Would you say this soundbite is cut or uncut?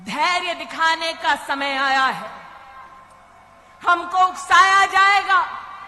uncut